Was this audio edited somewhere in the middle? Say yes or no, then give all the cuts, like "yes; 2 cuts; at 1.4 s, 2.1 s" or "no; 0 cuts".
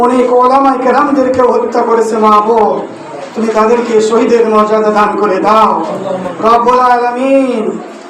no; 0 cuts